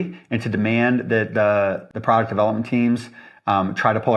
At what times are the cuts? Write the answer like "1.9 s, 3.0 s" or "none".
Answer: 1.9 s